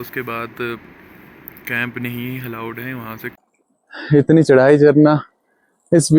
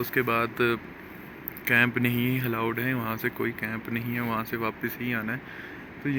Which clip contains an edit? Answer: first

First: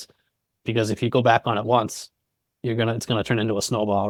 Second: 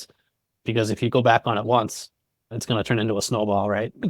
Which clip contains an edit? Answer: second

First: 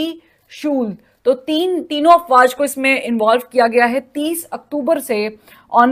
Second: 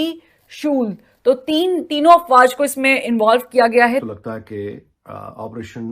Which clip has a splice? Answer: second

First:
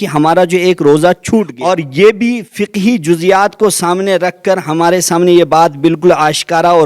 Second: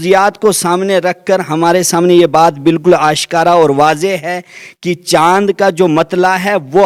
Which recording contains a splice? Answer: first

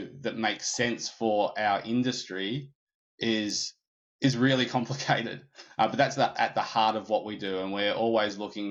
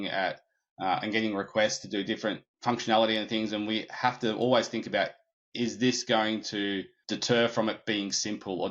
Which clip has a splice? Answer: second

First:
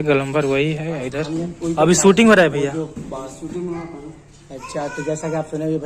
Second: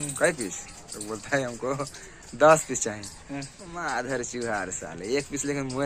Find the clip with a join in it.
first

